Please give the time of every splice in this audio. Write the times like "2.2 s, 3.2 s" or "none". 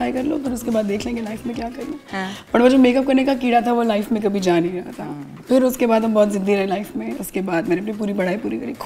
none

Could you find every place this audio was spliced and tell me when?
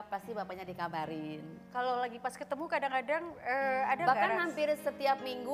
none

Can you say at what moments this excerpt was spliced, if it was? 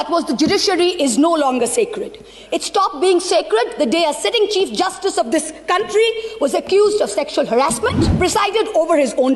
8.1 s

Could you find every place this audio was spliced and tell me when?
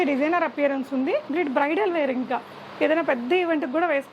1.3 s

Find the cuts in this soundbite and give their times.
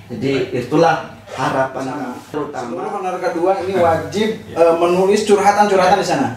2.9 s

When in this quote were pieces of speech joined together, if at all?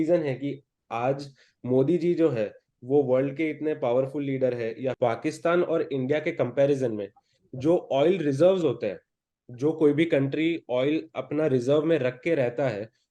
4.9 s

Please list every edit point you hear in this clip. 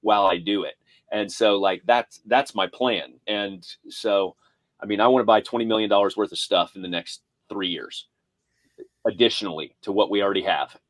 none

